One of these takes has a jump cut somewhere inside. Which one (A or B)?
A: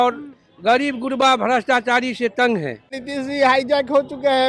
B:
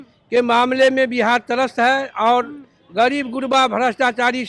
A